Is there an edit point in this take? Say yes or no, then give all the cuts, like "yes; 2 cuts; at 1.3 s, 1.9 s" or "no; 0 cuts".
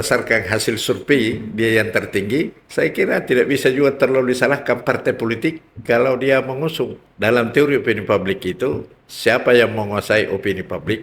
yes; 2 cuts; at 2.6 s, 7.0 s